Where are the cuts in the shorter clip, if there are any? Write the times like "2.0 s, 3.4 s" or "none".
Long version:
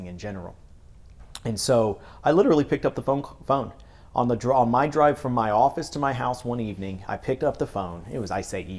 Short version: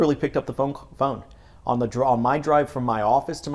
none